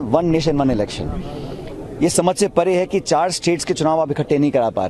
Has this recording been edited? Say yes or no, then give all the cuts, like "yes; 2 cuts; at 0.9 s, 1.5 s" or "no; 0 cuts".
no; 0 cuts